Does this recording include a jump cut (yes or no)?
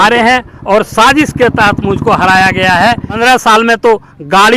yes